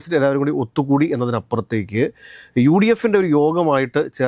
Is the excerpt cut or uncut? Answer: uncut